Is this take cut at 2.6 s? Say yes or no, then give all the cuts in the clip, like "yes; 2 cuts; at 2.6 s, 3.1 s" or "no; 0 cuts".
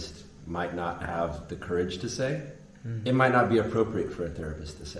no; 0 cuts